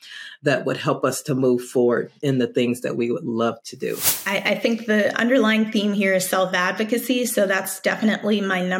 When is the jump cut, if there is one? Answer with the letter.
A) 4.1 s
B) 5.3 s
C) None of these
A